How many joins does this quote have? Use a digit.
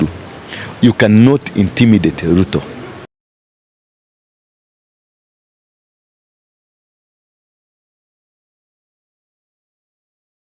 0